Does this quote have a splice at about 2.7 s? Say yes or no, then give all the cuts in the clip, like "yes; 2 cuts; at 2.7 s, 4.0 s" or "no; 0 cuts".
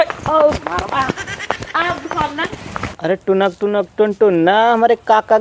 yes; 1 cut; at 2.7 s